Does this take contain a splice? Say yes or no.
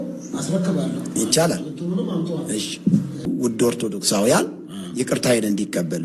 yes